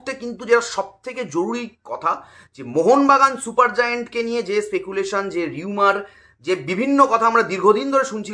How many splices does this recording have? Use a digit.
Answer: 0